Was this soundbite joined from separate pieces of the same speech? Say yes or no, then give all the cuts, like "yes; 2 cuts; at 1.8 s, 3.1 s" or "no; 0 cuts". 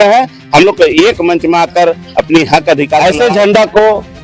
yes; 1 cut; at 3.0 s